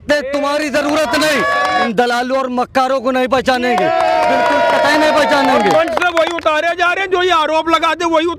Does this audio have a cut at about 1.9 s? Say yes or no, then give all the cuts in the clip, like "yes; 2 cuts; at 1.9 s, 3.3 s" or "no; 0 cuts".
yes; 1 cut; at 1.9 s